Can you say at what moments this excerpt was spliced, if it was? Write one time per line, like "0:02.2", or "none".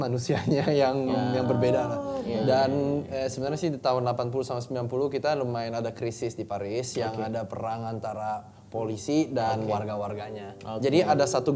none